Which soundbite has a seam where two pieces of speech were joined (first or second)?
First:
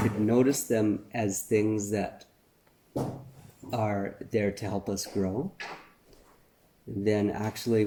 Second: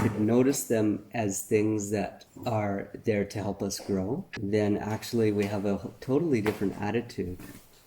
second